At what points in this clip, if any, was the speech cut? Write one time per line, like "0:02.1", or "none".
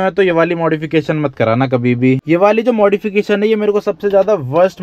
0:02.2